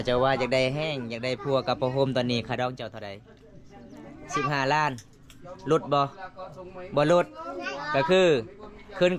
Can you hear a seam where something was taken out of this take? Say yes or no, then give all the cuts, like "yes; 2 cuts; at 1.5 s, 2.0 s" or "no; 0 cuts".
no; 0 cuts